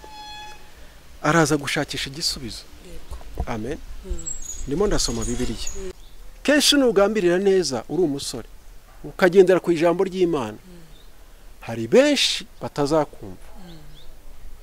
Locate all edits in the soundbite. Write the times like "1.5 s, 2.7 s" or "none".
6.0 s